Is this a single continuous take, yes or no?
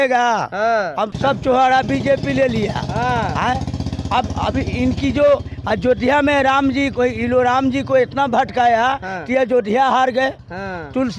yes